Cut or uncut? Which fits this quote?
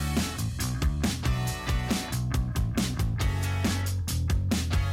cut